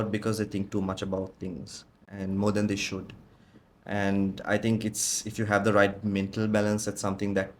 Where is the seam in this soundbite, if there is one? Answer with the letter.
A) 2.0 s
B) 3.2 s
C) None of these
C